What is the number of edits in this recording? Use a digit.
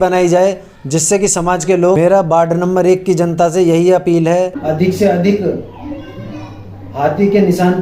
2